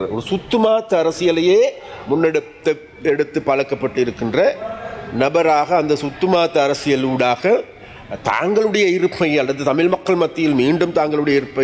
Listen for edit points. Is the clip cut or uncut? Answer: uncut